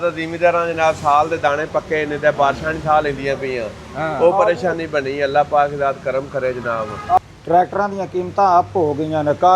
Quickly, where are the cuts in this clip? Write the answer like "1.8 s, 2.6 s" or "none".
none